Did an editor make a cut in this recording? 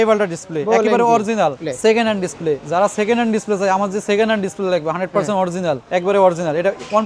yes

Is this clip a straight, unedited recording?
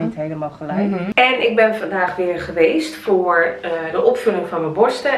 no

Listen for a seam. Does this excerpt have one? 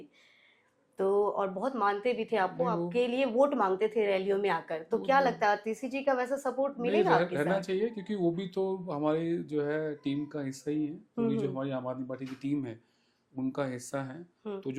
no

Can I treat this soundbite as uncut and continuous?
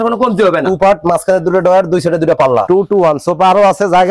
no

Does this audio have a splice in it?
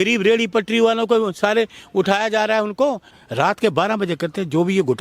yes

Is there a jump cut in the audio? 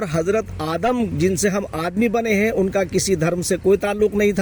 no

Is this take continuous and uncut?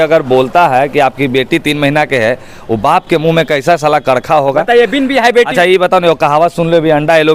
yes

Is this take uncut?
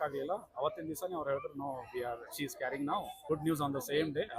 no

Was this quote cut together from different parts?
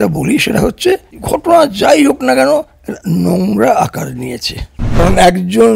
yes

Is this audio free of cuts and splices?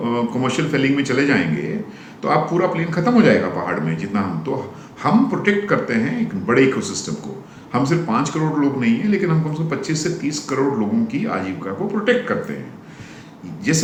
yes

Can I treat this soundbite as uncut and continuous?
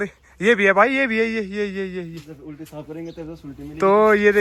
yes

